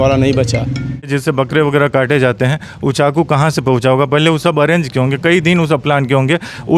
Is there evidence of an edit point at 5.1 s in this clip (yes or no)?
no